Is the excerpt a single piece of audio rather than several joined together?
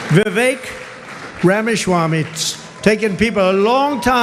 yes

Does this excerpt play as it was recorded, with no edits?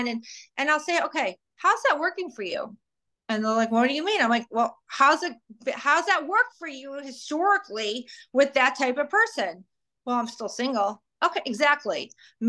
yes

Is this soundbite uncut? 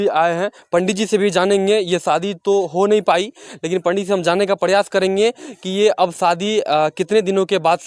yes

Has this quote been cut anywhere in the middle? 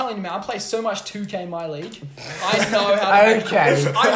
no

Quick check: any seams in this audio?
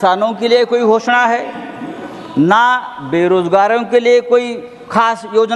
no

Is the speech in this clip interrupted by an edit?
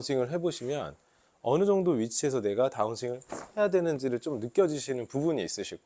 no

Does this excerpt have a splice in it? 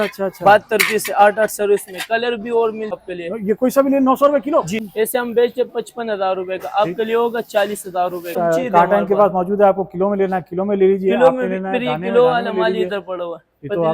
yes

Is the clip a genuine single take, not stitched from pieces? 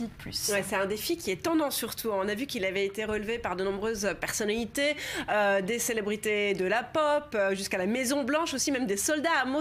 no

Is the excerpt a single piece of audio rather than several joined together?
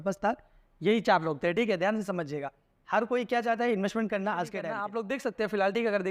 no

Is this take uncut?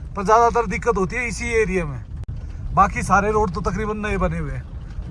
yes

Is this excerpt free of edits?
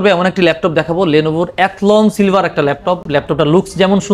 yes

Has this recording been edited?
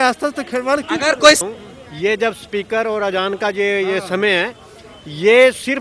yes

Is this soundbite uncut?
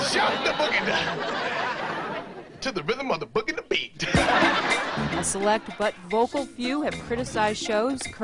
no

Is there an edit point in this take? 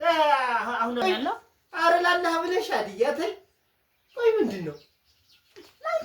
yes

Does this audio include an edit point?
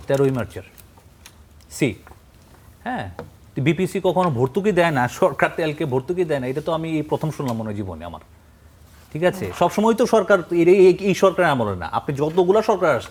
no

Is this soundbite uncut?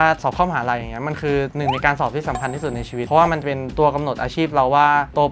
yes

